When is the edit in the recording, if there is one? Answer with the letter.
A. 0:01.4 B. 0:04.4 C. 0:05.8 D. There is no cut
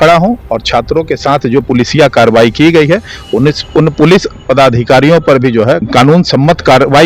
C